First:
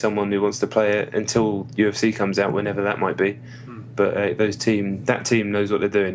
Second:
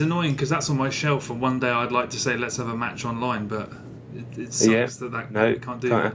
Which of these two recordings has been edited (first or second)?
first